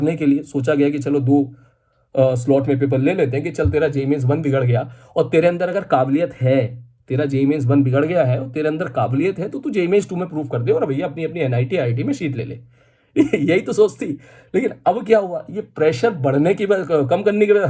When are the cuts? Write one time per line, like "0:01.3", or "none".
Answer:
none